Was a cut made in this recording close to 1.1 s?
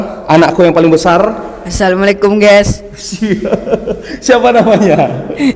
no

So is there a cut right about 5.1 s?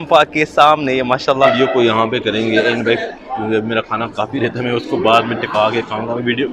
no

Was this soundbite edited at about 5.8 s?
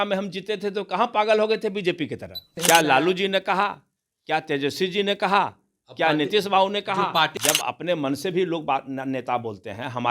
no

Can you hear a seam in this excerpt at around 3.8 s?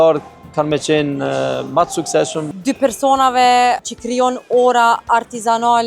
yes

